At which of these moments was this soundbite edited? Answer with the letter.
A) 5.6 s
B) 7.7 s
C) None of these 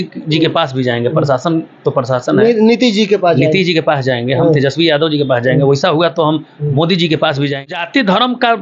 B